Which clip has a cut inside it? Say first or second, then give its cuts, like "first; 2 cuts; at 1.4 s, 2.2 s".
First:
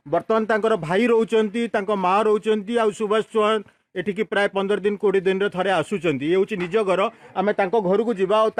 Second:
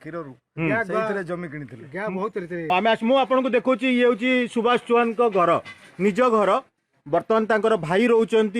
second; 1 cut; at 2.7 s